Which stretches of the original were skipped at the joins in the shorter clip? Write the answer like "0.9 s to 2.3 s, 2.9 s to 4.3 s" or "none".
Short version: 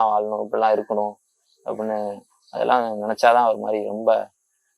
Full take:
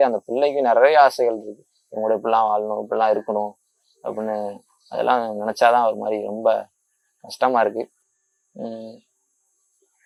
none